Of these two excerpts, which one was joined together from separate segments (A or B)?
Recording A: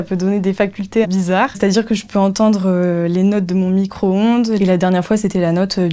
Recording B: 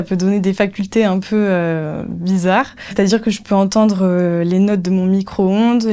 A